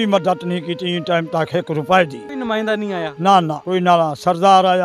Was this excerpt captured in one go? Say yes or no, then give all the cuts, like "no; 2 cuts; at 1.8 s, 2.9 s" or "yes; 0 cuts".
yes; 0 cuts